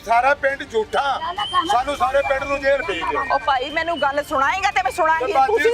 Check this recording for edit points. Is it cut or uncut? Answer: uncut